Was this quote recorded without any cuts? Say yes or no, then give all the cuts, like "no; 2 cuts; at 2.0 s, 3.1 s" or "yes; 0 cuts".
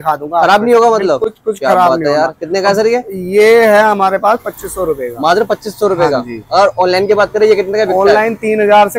yes; 0 cuts